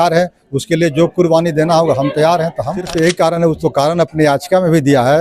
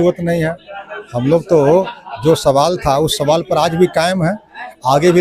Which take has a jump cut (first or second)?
first